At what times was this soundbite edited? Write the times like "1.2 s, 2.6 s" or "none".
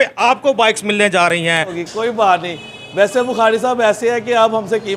1.8 s